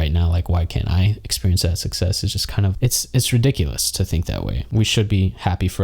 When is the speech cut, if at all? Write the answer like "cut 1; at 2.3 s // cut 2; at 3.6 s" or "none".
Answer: cut 1; at 4.6 s

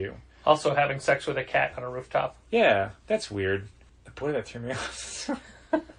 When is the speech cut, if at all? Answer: none

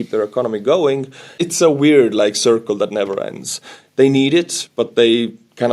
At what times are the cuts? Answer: cut 1; at 1.4 s

